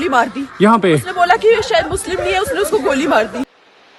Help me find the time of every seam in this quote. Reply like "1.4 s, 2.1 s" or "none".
none